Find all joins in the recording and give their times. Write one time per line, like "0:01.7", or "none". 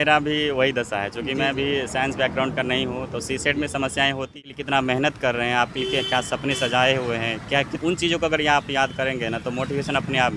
0:04.4
0:07.7